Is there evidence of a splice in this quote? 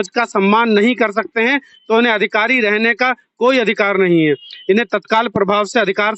no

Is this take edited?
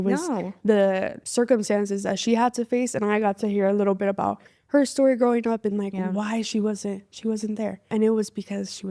yes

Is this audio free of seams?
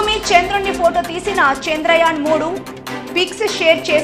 yes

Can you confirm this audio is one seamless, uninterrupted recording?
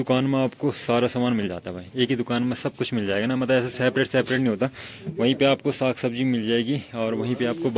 yes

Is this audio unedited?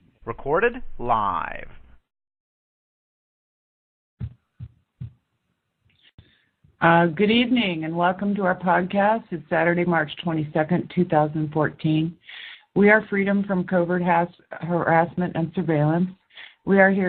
yes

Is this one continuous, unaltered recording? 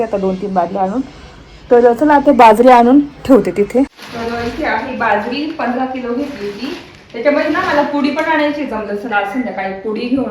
no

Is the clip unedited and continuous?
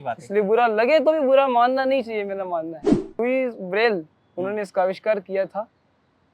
no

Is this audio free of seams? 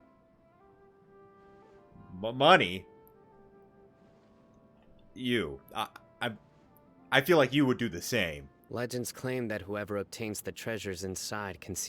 no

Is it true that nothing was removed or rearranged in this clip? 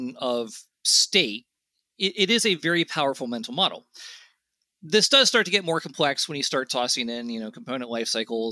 yes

